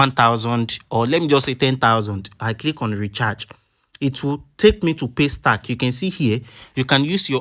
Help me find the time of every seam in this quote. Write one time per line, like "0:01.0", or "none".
none